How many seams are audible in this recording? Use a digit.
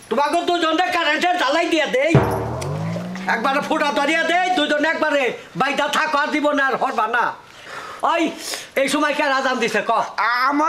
1